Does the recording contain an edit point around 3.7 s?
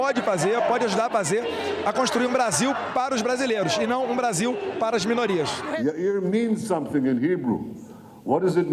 no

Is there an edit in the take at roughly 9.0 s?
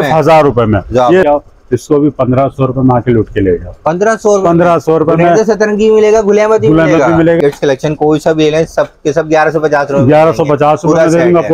no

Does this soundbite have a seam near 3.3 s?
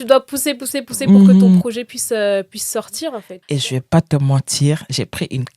yes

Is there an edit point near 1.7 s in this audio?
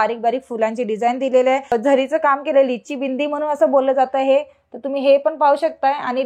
yes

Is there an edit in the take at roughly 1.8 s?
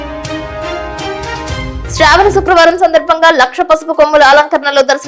yes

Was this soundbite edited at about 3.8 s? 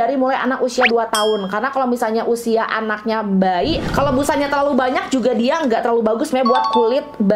yes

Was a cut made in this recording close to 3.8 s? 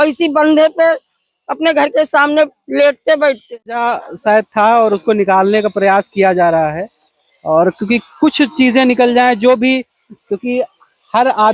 yes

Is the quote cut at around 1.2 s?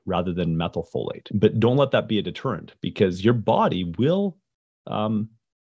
yes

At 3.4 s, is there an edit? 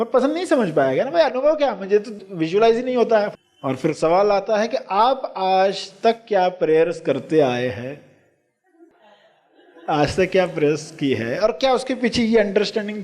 yes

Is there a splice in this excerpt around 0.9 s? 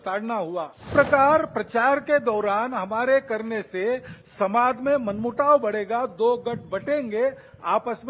yes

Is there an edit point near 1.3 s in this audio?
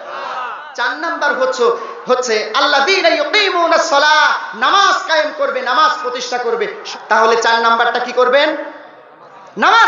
no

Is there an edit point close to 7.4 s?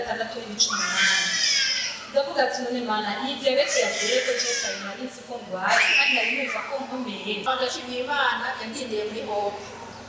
yes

